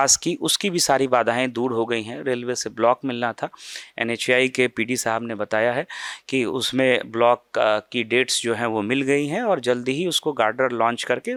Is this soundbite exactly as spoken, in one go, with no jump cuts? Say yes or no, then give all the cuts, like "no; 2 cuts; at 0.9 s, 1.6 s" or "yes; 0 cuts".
yes; 0 cuts